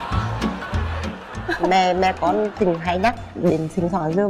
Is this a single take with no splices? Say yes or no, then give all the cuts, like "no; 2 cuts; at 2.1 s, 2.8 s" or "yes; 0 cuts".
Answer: yes; 0 cuts